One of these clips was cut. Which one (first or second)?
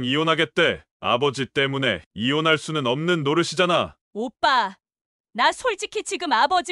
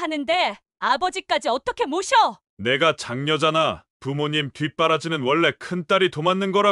first